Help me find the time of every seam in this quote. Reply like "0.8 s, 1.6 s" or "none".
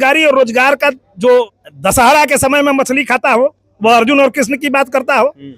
1.5 s